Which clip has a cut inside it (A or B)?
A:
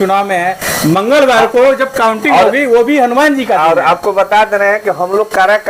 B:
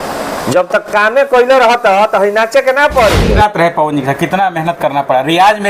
B